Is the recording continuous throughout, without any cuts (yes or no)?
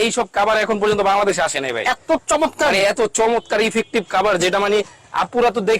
yes